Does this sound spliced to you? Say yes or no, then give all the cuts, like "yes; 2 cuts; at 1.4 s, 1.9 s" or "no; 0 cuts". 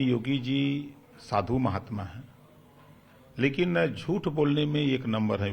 no; 0 cuts